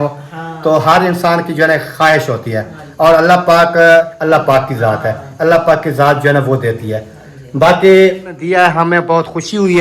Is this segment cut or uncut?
cut